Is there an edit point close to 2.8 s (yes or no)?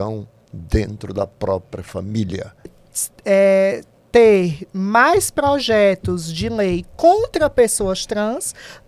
yes